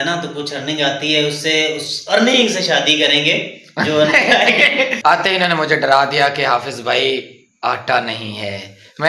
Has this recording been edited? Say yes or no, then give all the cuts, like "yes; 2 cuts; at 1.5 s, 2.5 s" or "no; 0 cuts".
yes; 1 cut; at 4.9 s